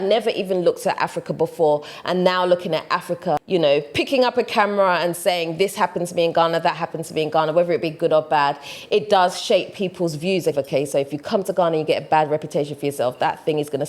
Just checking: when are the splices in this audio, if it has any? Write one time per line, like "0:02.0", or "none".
0:03.4
0:10.5